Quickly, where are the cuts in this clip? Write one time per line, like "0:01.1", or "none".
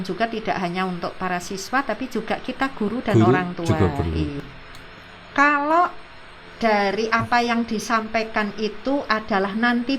0:04.4